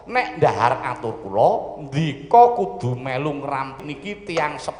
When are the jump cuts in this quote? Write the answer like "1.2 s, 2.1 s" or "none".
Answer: 3.8 s